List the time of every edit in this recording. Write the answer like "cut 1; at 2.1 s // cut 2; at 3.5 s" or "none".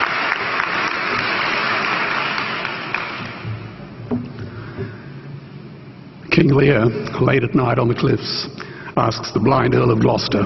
cut 1; at 3.7 s